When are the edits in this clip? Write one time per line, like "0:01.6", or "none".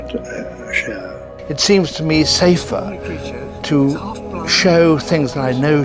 0:01.5